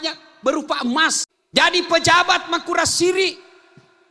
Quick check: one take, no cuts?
no; 1 cut; at 1.3 s

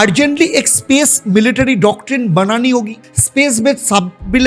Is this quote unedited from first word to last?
yes; 0 cuts

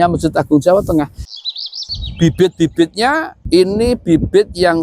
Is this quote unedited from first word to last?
no; 2 cuts; at 1.4 s, 3.3 s

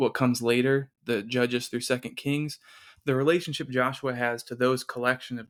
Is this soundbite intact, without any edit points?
yes; 0 cuts

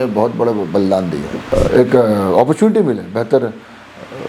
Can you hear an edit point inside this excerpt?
yes; 1 cut; at 1.5 s

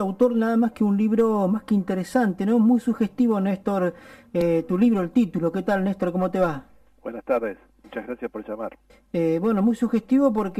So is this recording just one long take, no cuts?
yes; 0 cuts

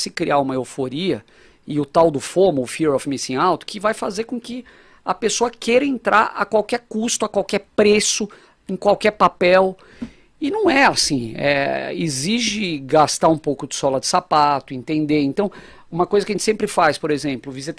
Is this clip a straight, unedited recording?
yes; 0 cuts

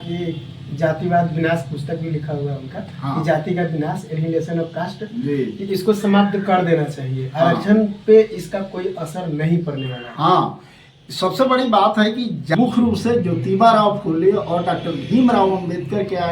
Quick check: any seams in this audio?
yes; 1 cut; at 12.5 s

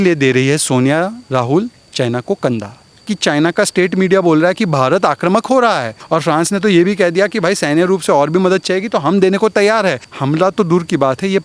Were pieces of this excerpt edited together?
yes; 3 cuts; at 3.1 s, 6.0 s, 10.1 s

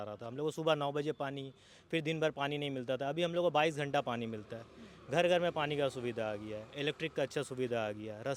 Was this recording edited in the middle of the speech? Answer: no; 0 cuts

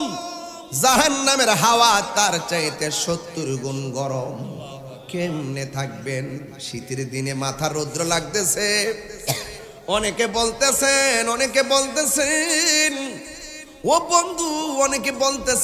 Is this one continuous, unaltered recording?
yes; 0 cuts

